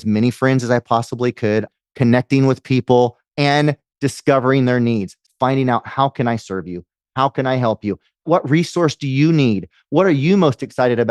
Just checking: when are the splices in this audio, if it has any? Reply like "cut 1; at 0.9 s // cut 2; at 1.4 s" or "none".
cut 1; at 1.7 s // cut 2; at 3.2 s // cut 3; at 5.2 s // cut 4; at 8.2 s